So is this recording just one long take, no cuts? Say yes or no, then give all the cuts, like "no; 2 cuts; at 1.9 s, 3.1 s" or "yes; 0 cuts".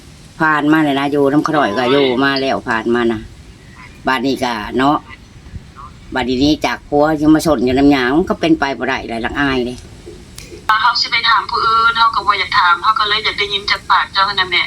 no; 1 cut; at 10.7 s